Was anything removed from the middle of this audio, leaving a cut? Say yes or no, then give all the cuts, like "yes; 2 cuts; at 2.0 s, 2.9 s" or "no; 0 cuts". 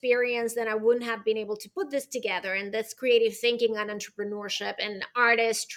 no; 0 cuts